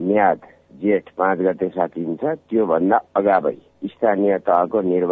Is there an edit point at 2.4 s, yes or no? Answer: no